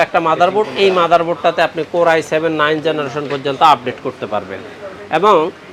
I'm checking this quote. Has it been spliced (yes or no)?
no